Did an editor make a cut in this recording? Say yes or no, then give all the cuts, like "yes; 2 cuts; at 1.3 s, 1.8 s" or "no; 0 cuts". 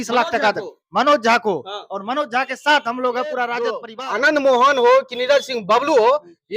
yes; 1 cut; at 3.9 s